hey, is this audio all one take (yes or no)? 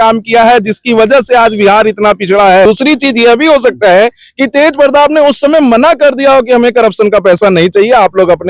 no